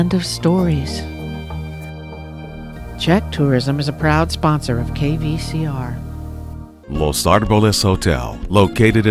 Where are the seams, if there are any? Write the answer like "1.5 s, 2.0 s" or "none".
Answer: 6.8 s

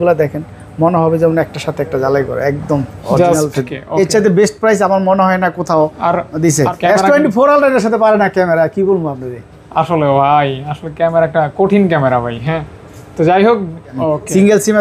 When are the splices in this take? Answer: 3.8 s, 6.7 s, 13.9 s

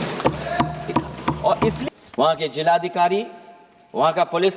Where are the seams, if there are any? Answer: 1.8 s

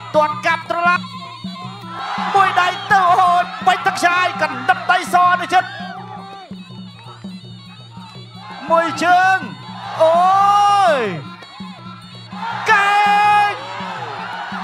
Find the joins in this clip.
1.0 s

